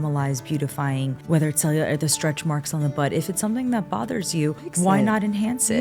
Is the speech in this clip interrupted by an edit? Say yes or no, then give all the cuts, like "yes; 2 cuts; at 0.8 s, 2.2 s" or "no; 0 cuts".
no; 0 cuts